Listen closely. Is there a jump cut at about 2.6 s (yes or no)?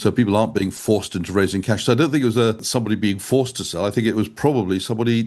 yes